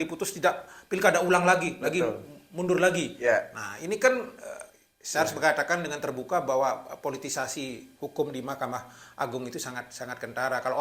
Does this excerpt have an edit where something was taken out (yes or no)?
no